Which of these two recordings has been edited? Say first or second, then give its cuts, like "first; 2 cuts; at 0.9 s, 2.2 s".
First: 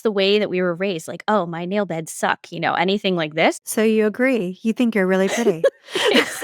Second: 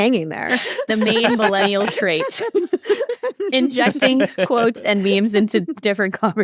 first; 1 cut; at 3.9 s